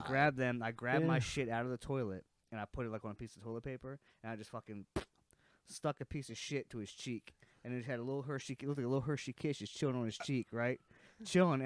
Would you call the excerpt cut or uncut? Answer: uncut